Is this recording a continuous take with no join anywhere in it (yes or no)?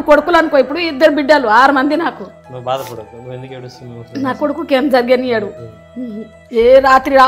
yes